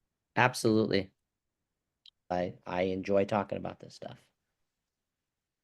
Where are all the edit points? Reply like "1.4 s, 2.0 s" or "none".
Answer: 2.3 s